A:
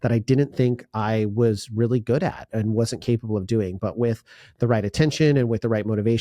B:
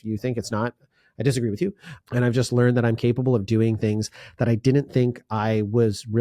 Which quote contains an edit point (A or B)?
B